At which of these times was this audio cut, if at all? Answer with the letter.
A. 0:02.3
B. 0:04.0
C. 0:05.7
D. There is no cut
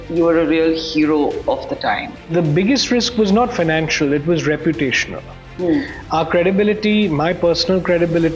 A